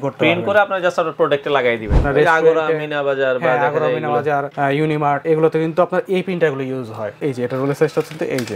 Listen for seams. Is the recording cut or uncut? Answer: cut